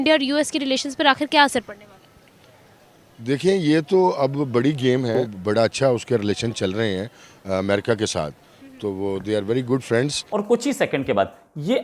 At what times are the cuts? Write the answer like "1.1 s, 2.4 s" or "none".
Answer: 5.2 s, 10.2 s